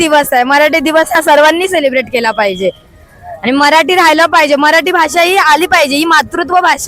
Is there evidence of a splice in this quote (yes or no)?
no